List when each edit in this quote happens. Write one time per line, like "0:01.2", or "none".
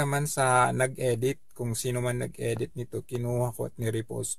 0:01.4
0:03.2